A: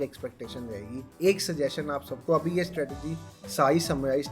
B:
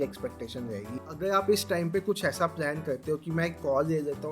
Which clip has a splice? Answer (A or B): B